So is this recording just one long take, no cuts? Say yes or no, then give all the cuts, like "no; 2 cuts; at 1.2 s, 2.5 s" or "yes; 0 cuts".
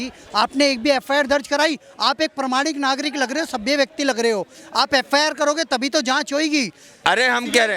no; 1 cut; at 6.9 s